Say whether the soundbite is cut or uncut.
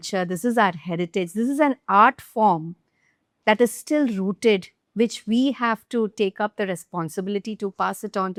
uncut